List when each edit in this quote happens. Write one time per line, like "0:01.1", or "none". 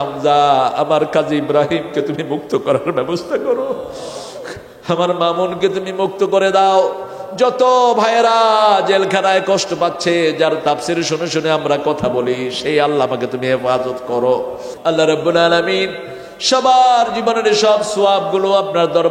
0:14.6